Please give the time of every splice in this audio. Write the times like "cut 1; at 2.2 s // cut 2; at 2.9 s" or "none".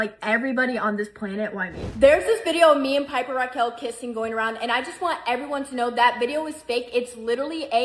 cut 1; at 1.9 s